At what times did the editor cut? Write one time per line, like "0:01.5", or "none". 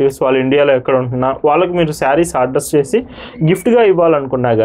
none